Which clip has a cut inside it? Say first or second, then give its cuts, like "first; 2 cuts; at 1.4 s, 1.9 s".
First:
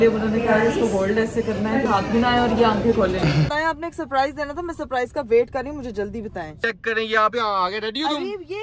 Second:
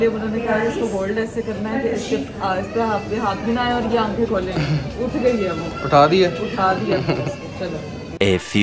first; 3 cuts; at 1.9 s, 3.5 s, 6.6 s